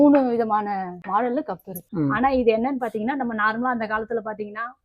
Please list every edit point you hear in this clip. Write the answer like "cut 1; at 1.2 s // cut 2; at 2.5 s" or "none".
cut 1; at 1.0 s // cut 2; at 1.8 s

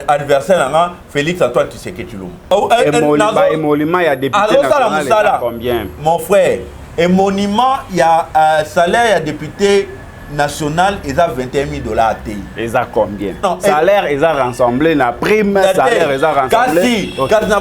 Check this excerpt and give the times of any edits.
cut 1; at 2.5 s // cut 2; at 13.4 s

